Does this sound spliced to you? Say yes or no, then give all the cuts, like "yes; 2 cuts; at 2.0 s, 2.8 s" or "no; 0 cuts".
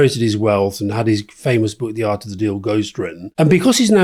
no; 0 cuts